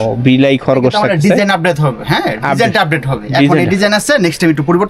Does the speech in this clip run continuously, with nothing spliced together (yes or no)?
yes